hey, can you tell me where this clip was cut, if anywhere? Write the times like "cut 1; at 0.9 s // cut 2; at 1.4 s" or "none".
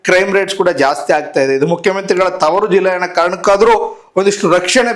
none